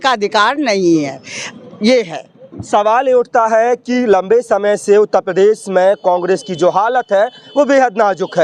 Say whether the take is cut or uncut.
uncut